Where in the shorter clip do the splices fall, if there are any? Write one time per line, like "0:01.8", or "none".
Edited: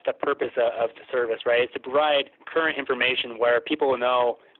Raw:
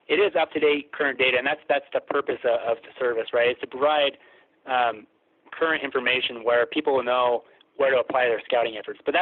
0:02.4